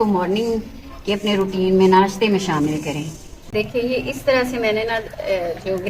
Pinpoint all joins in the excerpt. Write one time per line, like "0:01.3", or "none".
0:03.5